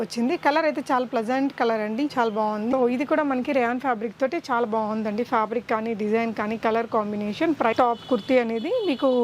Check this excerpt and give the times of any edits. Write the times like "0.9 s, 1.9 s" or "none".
2.7 s, 7.7 s

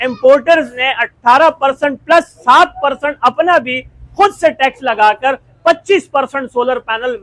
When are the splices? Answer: none

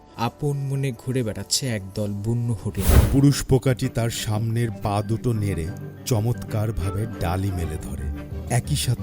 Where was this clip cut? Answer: 3.0 s

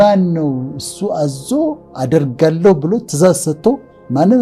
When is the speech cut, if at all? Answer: none

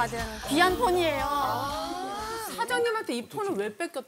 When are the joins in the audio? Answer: 2.5 s

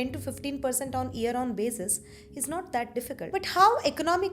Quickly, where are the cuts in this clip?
3.3 s

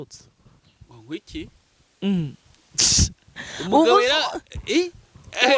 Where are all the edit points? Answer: none

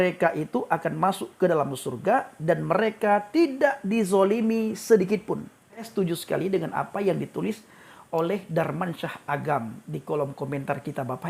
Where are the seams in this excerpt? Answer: 5.8 s

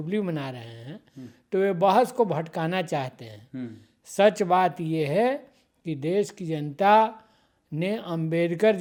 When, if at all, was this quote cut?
none

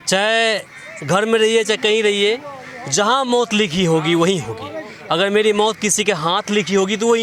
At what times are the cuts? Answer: none

